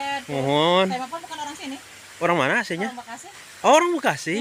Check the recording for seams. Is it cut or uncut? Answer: uncut